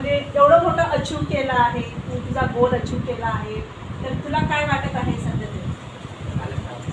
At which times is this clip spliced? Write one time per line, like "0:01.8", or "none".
none